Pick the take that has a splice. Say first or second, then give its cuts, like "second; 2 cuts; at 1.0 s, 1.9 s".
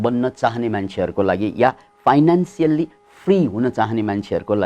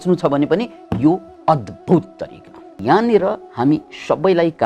second; 1 cut; at 2.8 s